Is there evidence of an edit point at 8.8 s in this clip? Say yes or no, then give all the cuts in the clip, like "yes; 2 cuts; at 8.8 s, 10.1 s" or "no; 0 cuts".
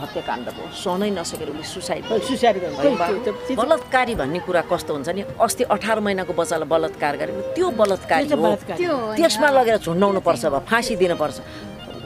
no; 1 cut; at 3.5 s